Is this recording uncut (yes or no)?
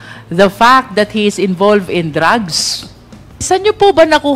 no